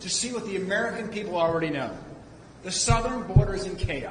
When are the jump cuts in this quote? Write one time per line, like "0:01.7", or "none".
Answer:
none